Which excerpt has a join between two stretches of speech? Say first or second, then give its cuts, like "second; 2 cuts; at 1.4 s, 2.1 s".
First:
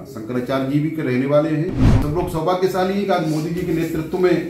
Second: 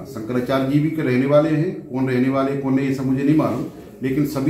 first; 1 cut; at 2.0 s